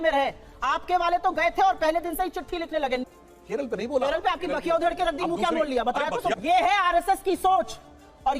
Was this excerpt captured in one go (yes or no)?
no